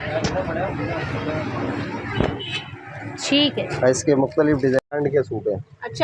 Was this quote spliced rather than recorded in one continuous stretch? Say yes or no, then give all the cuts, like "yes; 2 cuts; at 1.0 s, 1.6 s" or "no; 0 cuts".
yes; 1 cut; at 4.8 s